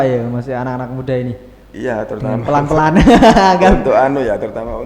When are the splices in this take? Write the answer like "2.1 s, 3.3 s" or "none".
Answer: none